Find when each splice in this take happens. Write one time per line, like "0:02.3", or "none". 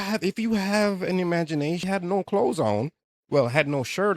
0:01.8